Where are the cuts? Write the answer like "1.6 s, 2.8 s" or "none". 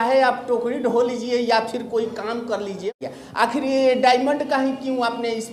2.9 s